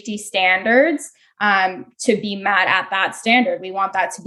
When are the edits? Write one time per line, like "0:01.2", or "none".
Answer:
none

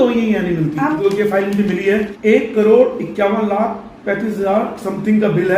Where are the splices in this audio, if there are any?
0:01.0
0:02.1

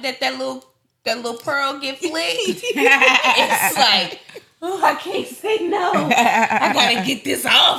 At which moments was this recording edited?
none

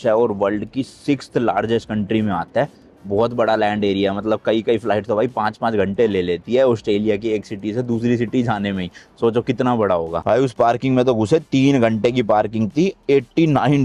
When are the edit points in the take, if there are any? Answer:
0:10.2

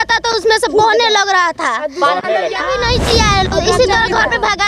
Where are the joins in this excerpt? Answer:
0:02.6

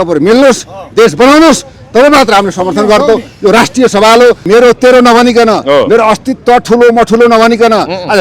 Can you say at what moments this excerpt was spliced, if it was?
0:04.4

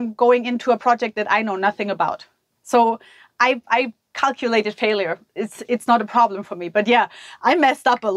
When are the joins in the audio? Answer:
none

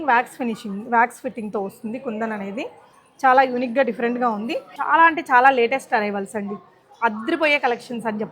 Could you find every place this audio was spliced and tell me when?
0:04.7

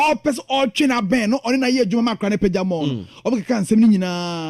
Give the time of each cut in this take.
none

